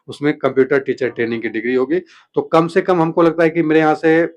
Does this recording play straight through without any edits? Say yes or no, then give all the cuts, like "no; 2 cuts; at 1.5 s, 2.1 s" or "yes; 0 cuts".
no; 1 cut; at 2.1 s